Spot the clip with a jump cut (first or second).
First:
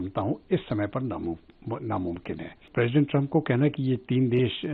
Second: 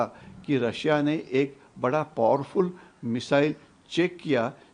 first